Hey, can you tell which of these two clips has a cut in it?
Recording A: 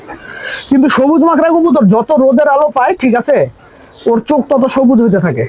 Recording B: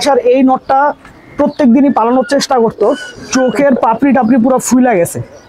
B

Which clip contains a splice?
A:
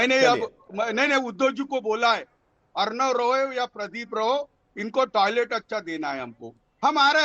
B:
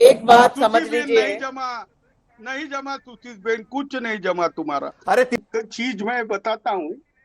B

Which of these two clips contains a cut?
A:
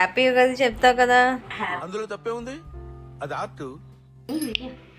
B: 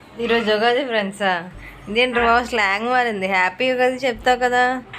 A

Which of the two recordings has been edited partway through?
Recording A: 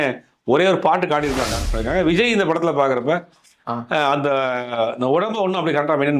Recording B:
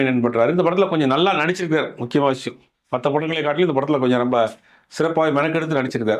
A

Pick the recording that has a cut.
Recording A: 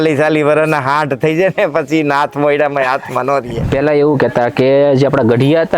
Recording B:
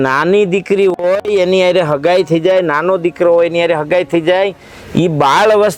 A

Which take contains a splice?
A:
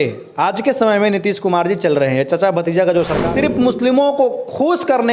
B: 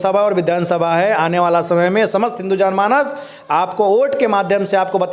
A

